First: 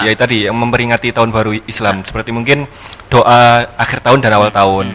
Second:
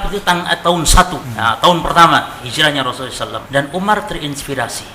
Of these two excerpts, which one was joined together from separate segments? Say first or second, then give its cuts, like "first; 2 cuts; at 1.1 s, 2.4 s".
second; 2 cuts; at 1.2 s, 3.3 s